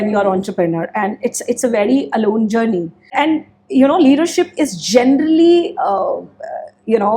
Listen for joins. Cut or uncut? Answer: uncut